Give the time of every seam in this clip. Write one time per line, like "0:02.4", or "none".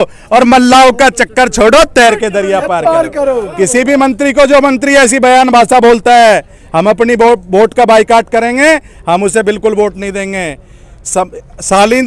none